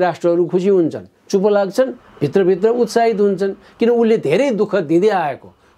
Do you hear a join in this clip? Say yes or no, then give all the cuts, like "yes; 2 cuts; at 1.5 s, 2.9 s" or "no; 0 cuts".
no; 0 cuts